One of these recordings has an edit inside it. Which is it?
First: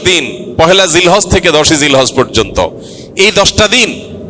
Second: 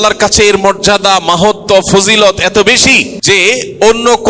second; 1 cut; at 3.1 s

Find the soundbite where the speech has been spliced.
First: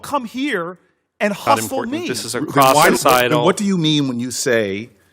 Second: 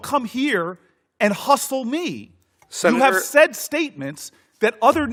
first; 1 cut; at 2.1 s

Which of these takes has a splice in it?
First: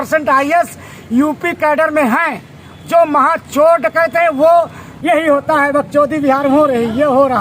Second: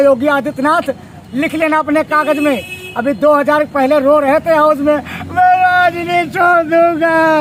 first; 1 cut; at 4.8 s

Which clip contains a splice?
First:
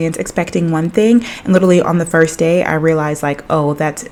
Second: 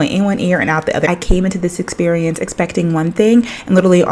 second; 1 cut; at 1.1 s

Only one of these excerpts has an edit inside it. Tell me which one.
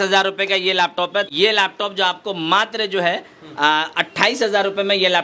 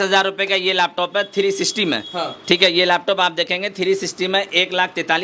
first; 1 cut; at 1.3 s

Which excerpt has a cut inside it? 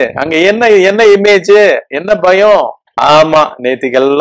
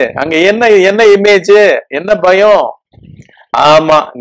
first; 1 cut; at 2.8 s

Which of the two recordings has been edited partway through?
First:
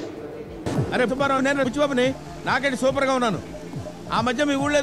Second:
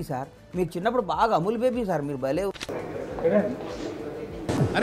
second; 1 cut; at 2.9 s

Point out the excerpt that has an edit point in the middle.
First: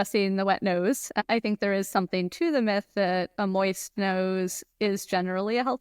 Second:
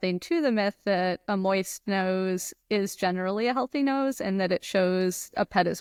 first; 1 cut; at 1.2 s

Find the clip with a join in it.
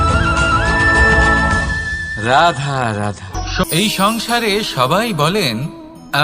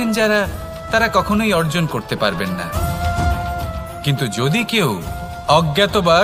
first; 1 cut; at 3.6 s

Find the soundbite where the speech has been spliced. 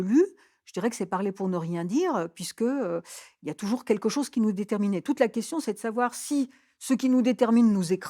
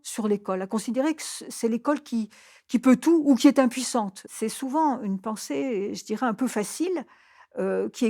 second; 1 cut; at 4.2 s

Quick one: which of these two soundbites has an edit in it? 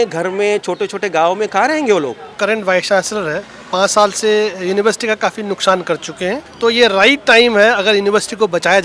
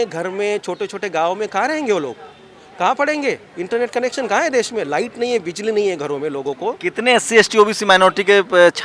first; 2 cuts; at 2.4 s, 6.5 s

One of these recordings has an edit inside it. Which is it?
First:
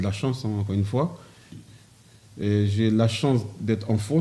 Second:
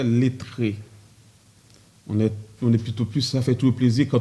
first; 1 cut; at 1.6 s

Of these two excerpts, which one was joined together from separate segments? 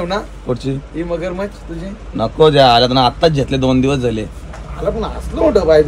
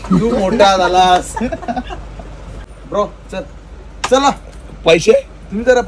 second; 1 cut; at 2.8 s

